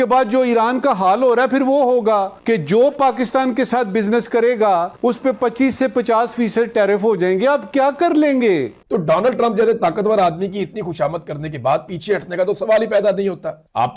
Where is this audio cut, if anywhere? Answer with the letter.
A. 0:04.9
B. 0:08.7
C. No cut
B